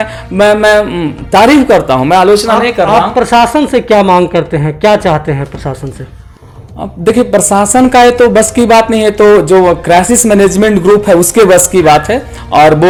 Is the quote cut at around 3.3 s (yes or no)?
no